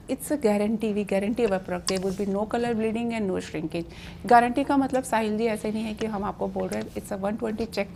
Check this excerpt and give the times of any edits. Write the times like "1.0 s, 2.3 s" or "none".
none